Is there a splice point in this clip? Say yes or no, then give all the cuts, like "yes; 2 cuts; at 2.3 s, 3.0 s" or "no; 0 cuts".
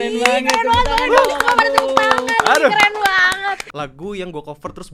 yes; 1 cut; at 3.7 s